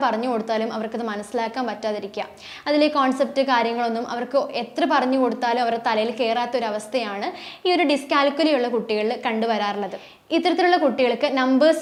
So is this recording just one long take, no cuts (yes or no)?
yes